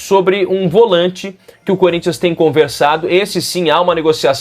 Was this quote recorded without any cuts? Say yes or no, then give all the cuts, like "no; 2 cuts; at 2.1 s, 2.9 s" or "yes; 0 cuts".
yes; 0 cuts